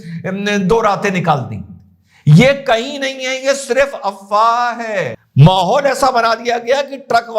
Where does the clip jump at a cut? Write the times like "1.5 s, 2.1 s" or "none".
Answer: 5.2 s